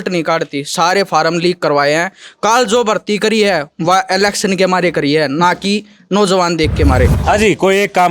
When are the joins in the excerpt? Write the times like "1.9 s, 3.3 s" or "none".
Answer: 7.2 s